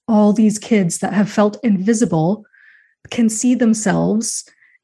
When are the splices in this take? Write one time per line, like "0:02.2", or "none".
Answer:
none